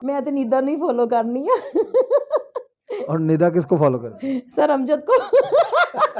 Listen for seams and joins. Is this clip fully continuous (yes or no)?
yes